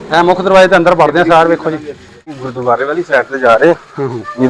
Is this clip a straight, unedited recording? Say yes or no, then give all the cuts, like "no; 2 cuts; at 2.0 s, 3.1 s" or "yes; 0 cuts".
no; 1 cut; at 2.4 s